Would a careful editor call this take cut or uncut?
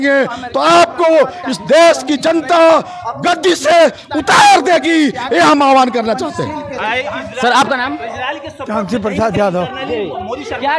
uncut